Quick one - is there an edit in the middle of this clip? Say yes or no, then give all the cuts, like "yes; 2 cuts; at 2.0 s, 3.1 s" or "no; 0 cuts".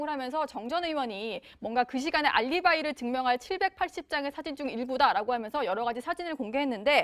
yes; 1 cut; at 2.9 s